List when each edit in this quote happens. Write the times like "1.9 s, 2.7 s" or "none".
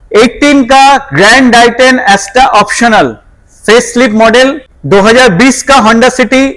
4.7 s